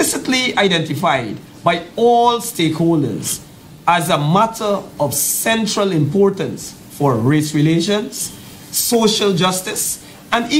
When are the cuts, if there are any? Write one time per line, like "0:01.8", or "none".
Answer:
none